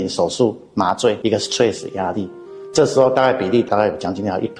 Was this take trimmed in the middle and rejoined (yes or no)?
yes